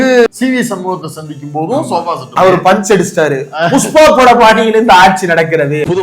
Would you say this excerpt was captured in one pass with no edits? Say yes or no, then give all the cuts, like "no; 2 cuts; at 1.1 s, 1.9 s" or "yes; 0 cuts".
no; 1 cut; at 2.3 s